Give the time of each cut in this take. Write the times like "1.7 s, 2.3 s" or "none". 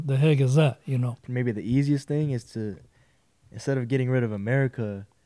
1.2 s